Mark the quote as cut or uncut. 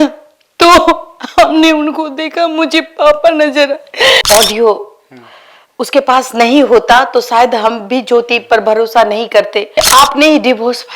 cut